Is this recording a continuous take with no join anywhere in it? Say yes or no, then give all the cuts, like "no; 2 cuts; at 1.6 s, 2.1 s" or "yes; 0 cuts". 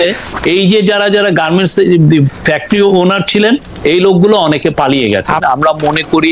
no; 1 cut; at 5.4 s